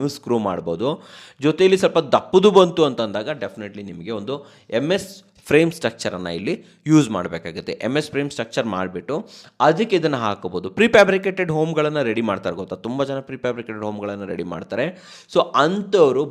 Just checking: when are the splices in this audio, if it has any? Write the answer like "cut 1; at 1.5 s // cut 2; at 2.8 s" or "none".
none